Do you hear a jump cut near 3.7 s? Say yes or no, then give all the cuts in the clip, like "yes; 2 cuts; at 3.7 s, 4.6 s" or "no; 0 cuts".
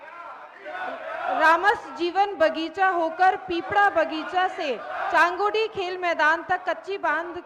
no; 0 cuts